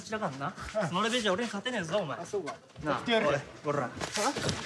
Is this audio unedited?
yes; 0 cuts

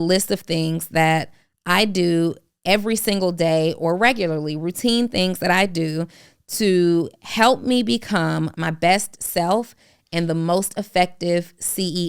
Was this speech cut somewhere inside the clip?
yes; 1 cut; at 8.5 s

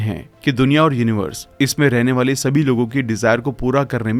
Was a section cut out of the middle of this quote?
no; 0 cuts

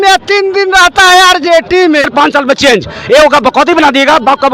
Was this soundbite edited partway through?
yes; 1 cut; at 2.1 s

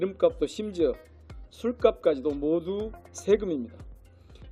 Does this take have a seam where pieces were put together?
no; 0 cuts

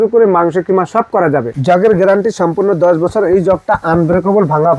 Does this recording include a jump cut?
yes; 1 cut; at 1.5 s

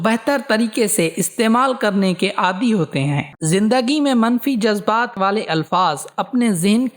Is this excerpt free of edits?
no; 2 cuts; at 3.3 s, 5.3 s

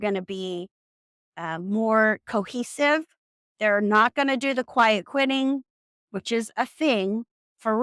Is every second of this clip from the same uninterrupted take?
yes; 0 cuts

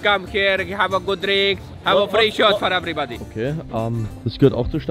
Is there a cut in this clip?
no; 0 cuts

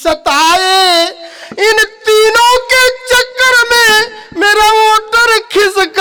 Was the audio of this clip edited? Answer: no; 0 cuts

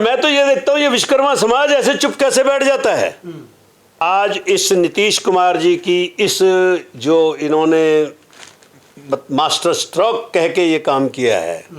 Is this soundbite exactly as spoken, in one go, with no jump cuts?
no; 1 cut; at 4.0 s

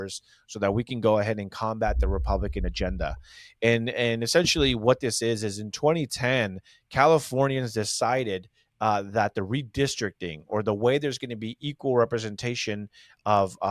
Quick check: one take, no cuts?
yes; 0 cuts

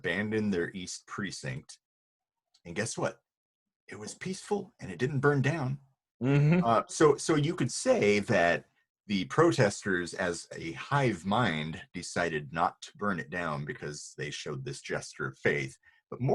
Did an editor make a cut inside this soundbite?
no; 0 cuts

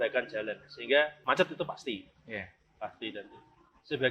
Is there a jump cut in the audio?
yes; 1 cut; at 1.2 s

